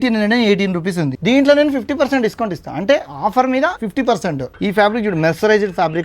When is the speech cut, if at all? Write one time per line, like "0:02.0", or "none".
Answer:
0:01.1
0:04.2